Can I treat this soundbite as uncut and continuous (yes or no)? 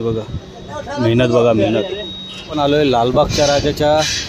no